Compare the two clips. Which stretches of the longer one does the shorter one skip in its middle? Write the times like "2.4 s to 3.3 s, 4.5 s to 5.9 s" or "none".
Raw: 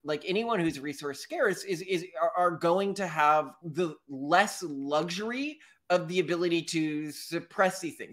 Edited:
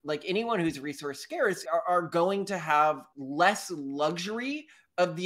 1.6 s to 2.1 s, 3.6 s to 4.0 s